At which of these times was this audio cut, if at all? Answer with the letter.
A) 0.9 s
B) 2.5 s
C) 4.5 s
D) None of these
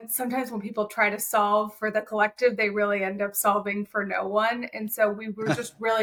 D